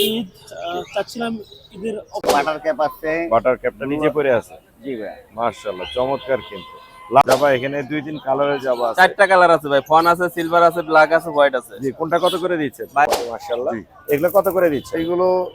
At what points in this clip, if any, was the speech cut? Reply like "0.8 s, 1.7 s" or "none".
2.2 s, 7.2 s, 13.1 s